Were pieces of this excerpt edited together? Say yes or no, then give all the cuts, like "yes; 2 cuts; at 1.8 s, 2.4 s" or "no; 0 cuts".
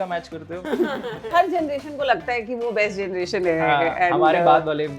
yes; 1 cut; at 1.3 s